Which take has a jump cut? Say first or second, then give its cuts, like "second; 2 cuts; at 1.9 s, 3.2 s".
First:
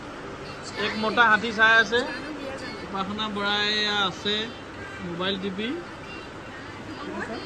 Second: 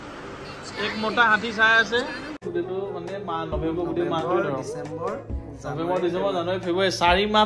second; 1 cut; at 2.4 s